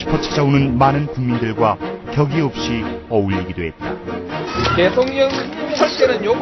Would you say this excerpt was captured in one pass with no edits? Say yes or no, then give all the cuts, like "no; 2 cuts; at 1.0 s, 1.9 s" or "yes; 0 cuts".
yes; 0 cuts